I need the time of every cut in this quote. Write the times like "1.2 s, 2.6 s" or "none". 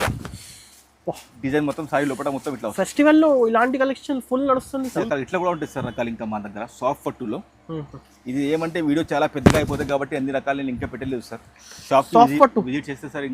5.0 s